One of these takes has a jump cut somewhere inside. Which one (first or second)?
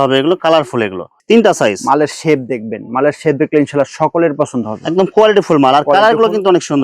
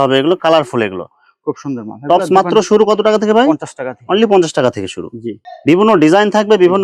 first